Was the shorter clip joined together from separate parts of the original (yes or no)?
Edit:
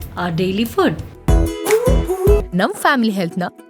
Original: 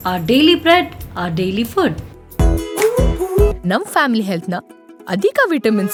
yes